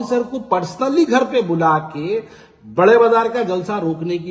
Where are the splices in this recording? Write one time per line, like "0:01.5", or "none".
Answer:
none